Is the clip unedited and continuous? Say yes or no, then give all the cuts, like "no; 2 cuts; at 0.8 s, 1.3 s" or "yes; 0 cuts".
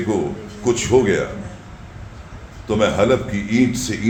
yes; 0 cuts